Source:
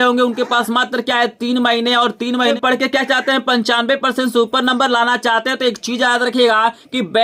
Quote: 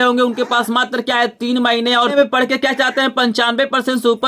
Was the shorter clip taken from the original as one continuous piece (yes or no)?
no